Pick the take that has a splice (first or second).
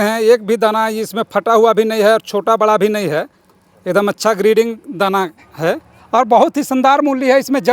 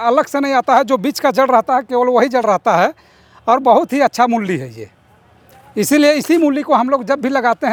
first